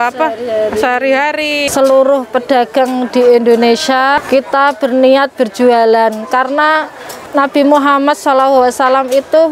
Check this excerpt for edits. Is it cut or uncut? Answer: cut